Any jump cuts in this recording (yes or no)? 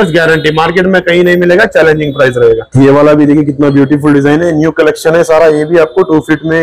yes